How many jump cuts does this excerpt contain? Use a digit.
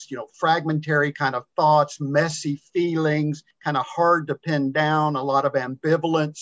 1